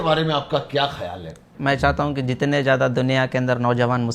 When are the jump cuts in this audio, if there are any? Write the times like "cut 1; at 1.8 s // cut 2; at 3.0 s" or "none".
cut 1; at 1.4 s